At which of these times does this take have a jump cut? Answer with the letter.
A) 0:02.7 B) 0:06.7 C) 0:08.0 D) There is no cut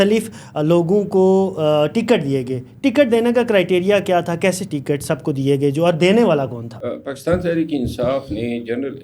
B